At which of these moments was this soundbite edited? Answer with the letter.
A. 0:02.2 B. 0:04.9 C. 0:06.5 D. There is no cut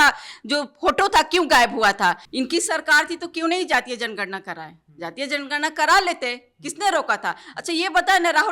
A